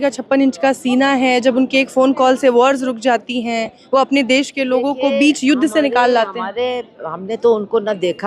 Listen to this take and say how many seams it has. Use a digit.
0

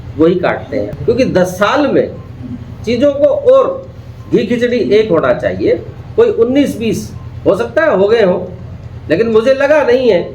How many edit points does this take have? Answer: 1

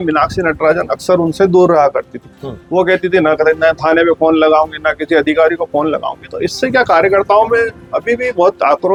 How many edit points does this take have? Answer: 0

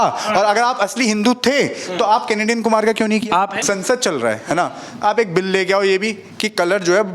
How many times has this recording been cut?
1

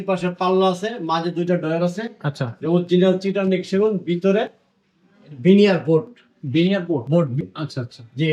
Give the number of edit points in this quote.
1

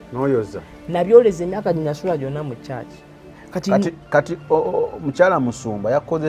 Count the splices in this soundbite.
1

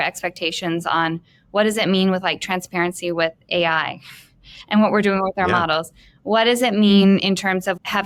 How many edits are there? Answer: 0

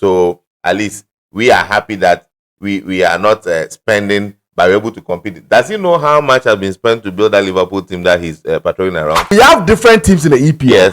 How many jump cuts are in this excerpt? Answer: 1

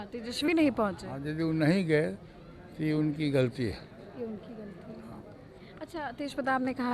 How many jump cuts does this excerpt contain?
0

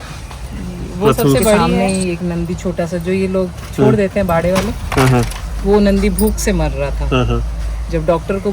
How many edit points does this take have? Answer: 1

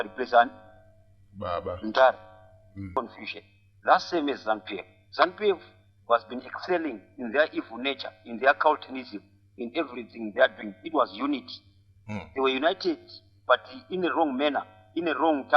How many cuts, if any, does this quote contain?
1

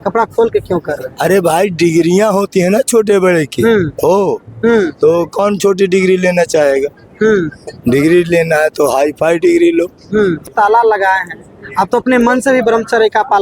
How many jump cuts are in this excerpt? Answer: 1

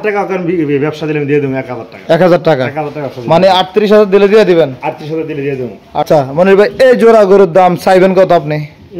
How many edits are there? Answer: 1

